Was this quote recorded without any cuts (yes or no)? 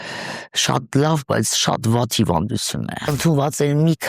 no